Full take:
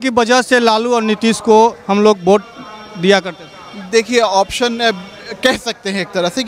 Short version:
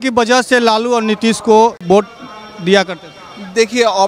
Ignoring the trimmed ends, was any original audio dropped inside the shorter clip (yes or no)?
yes